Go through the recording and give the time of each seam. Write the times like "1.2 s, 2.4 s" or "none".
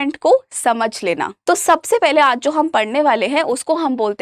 1.3 s